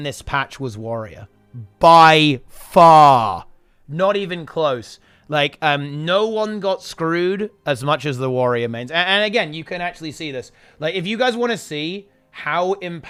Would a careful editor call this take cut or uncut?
uncut